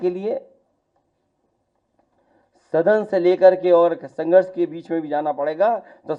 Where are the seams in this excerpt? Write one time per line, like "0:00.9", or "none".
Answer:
none